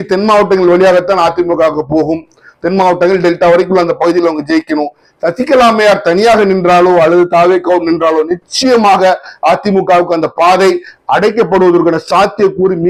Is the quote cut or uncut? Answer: uncut